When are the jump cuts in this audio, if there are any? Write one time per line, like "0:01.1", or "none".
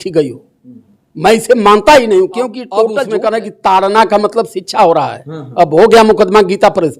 0:03.0